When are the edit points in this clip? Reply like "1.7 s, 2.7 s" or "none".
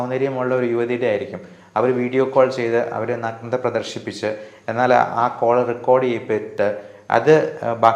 none